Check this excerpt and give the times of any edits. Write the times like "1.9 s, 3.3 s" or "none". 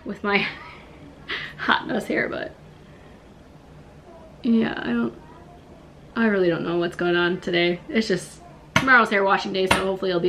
none